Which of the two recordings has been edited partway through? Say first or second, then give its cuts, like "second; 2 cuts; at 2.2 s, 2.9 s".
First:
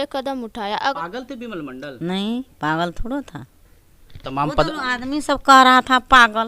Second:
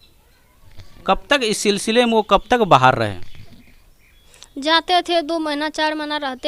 first; 1 cut; at 0.9 s